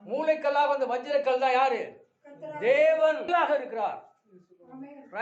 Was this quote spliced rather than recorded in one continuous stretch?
yes; 1 cut; at 3.3 s

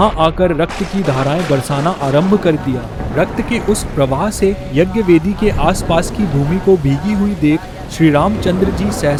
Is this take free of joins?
yes; 0 cuts

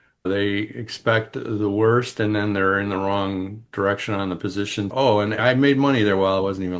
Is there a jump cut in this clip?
yes; 1 cut; at 4.9 s

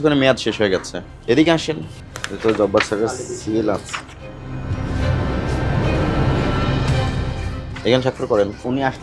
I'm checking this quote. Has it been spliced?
no; 0 cuts

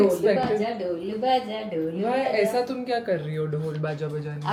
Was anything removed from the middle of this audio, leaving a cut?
no; 0 cuts

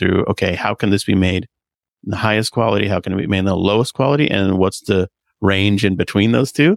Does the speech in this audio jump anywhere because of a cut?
no; 0 cuts

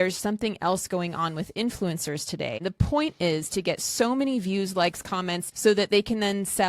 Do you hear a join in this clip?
yes; 2 cuts; at 2.6 s, 5.4 s

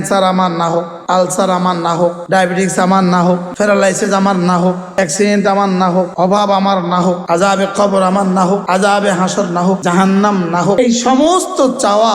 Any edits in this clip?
yes; 9 cuts; at 0.9 s, 2.2 s, 3.5 s, 4.8 s, 6.1 s, 7.2 s, 8.6 s, 9.8 s, 10.8 s

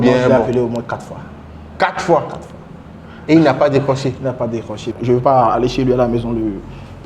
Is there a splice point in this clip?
yes; 1 cut; at 4.8 s

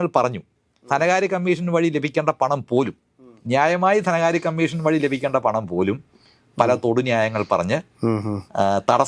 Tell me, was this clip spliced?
no; 0 cuts

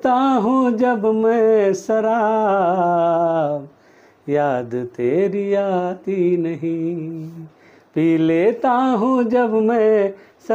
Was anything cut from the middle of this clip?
no; 0 cuts

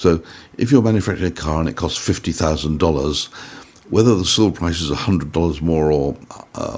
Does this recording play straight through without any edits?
yes; 0 cuts

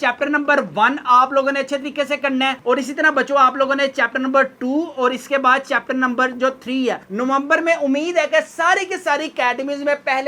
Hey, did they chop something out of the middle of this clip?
no; 0 cuts

